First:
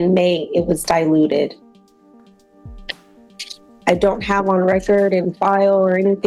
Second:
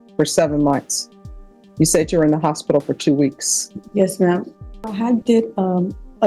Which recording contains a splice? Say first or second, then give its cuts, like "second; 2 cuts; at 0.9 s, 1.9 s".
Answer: second; 1 cut; at 4.9 s